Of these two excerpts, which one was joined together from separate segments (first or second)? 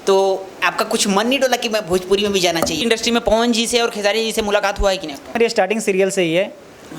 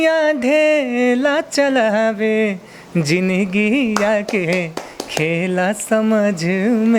first